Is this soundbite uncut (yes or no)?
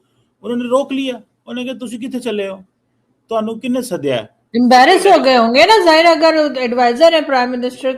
no